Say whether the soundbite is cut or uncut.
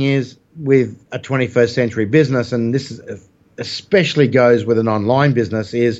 uncut